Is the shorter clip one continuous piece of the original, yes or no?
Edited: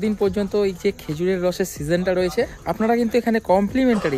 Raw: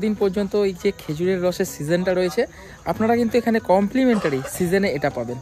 no